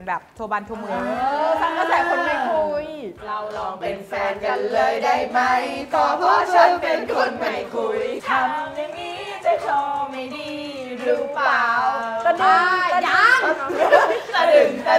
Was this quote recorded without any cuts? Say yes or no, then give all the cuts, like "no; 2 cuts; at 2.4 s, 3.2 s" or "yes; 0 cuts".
no; 2 cuts; at 3.2 s, 8.2 s